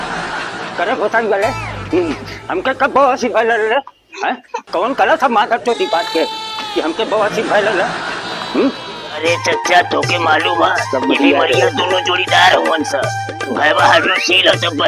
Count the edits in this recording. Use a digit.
1